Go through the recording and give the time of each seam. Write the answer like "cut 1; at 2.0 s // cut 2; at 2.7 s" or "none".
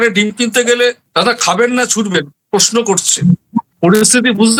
none